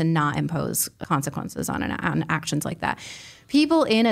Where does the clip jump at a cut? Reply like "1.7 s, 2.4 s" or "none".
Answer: 1.0 s

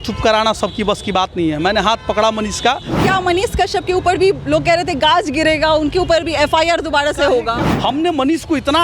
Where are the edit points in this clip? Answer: 3.0 s, 7.6 s

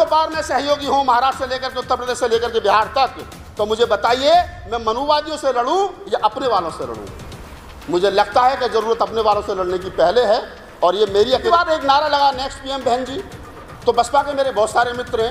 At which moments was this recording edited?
11.5 s

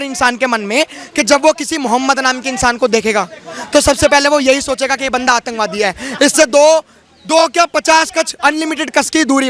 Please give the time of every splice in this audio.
none

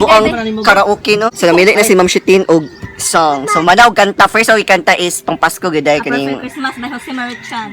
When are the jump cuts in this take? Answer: 1.3 s

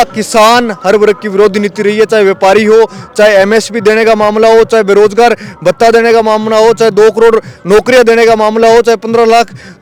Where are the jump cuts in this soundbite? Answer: none

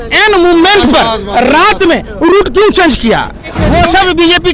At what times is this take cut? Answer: 3.5 s

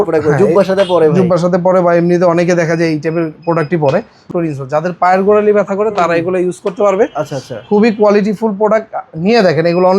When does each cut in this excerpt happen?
4.3 s

